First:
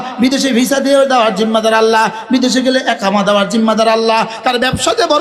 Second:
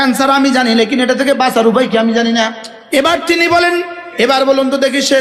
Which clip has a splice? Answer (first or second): second